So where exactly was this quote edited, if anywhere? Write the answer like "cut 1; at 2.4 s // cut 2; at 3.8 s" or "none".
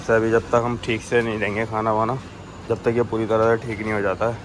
none